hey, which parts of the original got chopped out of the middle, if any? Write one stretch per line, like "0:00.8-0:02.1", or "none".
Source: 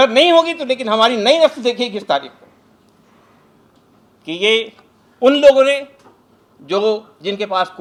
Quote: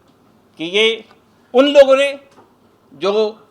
none

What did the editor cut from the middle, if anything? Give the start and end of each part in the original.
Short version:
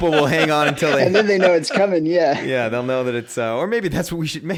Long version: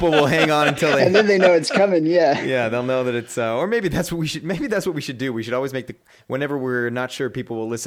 none

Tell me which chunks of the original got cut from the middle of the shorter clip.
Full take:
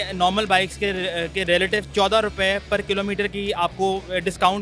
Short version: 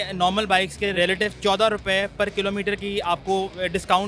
0:00.9-0:01.5

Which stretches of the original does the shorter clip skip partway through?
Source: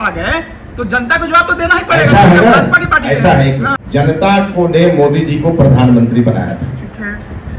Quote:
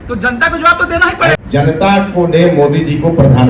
0:02.1-0:03.8

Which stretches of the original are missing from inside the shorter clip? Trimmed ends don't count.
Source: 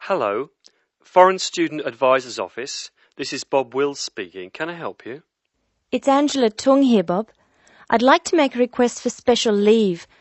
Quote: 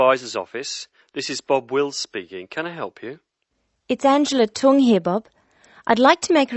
none

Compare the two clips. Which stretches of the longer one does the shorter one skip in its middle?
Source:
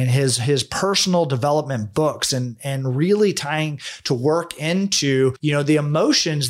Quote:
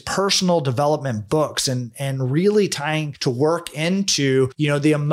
0:03.8-0:04.0

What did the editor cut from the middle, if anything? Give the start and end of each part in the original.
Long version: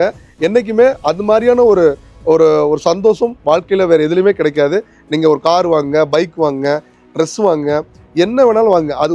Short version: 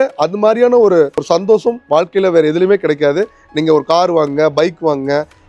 0:02.1-0:02.8

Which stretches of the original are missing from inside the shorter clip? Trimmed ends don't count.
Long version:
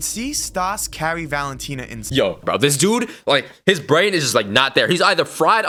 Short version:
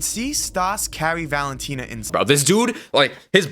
0:02.1-0:02.4

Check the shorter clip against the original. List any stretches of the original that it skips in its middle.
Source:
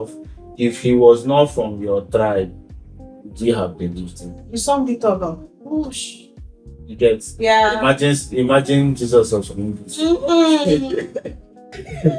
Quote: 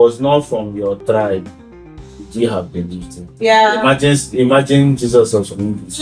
0:04.3-0:07.3

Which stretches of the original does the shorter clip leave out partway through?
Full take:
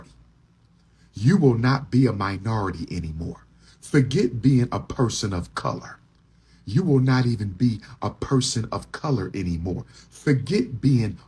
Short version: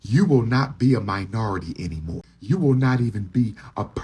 0:03.4-0:06.6

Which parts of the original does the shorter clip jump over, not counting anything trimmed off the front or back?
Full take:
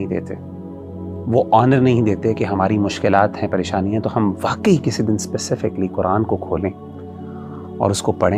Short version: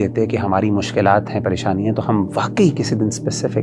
none

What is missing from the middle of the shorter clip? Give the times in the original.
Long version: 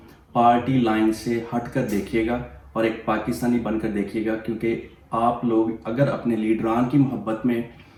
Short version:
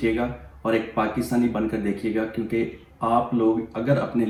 none

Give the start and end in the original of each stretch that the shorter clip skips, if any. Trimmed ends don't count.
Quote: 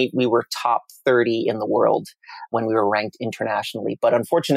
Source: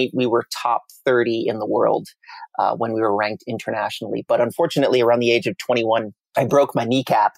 0:02.5-0:02.8

